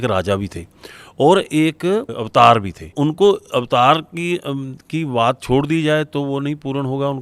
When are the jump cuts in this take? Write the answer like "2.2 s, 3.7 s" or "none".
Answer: 2.1 s, 2.9 s

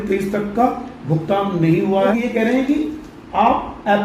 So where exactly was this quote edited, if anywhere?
2.1 s

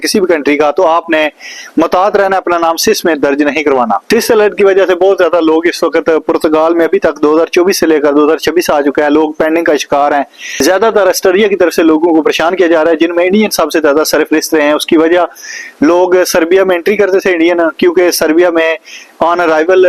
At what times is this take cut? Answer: none

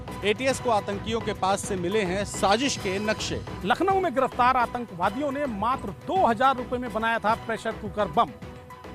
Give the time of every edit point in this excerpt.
3.5 s

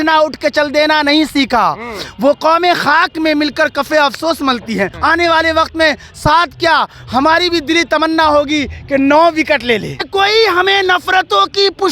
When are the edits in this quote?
4.9 s, 10.1 s

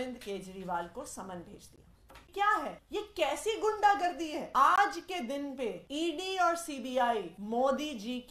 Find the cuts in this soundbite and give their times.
2.3 s, 2.8 s, 4.4 s, 5.8 s, 7.4 s

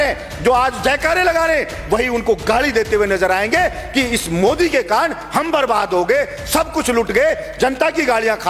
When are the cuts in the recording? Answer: none

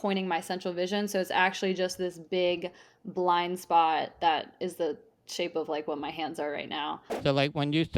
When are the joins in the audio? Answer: 7.1 s

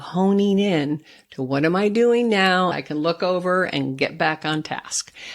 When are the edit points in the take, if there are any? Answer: 2.7 s

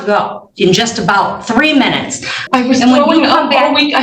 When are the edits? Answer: 2.4 s

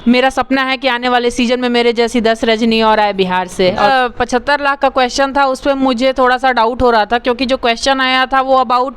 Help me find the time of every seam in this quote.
3.9 s

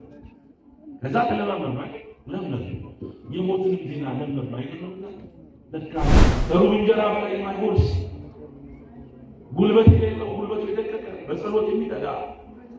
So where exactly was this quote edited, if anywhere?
6.2 s

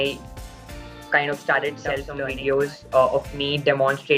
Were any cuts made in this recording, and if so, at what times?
2.2 s

